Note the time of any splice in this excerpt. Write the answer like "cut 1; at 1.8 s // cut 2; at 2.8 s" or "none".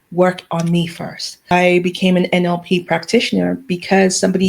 cut 1; at 1.5 s